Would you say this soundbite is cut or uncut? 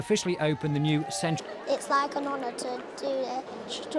uncut